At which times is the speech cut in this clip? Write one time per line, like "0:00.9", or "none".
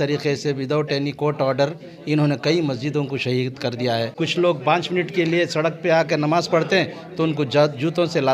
0:04.2